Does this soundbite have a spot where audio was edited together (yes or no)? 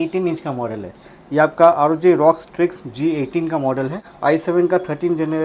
yes